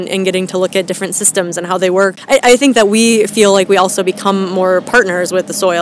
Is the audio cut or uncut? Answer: cut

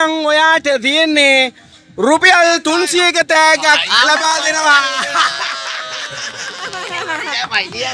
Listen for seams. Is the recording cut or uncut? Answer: uncut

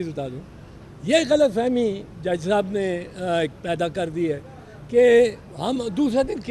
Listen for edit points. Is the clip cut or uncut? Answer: uncut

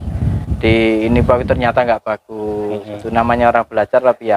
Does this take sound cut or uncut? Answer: uncut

